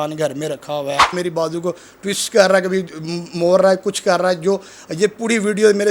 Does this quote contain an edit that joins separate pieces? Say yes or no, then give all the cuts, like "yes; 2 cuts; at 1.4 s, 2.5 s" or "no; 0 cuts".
yes; 1 cut; at 1.1 s